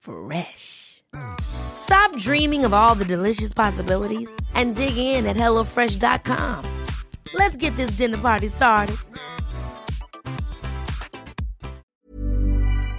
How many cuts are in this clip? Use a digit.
1